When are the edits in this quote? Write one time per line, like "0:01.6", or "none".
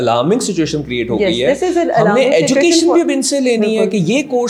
none